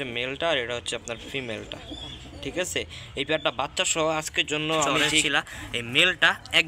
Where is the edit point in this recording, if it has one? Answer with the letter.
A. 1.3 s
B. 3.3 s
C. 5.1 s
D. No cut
C